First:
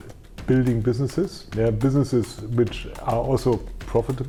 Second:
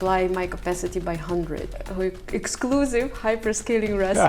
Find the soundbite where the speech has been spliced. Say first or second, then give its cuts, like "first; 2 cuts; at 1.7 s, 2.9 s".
second; 1 cut; at 1.7 s